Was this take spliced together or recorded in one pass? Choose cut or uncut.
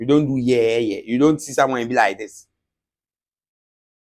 uncut